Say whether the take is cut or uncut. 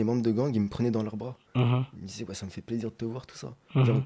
uncut